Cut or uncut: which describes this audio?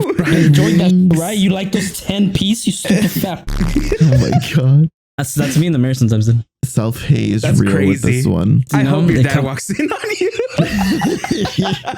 cut